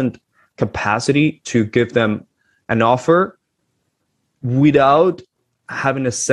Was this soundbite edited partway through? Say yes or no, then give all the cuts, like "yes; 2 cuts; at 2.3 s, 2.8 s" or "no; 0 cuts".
no; 0 cuts